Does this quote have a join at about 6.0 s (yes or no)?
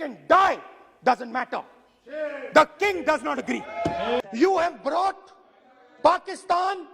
no